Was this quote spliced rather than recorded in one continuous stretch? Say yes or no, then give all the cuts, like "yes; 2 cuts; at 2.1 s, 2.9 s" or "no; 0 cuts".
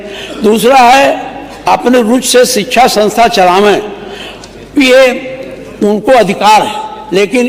no; 0 cuts